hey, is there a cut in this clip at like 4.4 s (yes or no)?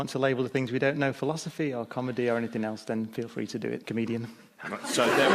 yes